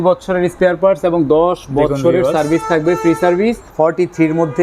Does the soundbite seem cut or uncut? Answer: cut